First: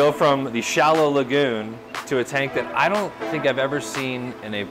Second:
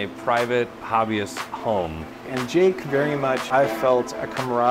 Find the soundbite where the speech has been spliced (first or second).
second